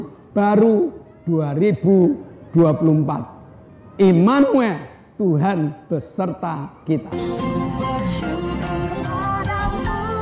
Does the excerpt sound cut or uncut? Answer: uncut